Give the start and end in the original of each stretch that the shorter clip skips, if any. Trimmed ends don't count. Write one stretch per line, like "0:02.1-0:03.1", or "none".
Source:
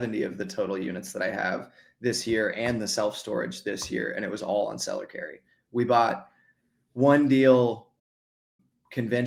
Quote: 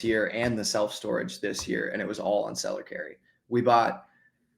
none